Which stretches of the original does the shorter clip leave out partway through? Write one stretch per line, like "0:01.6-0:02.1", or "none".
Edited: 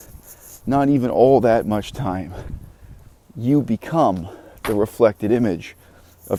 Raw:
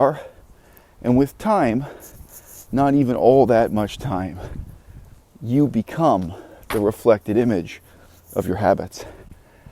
none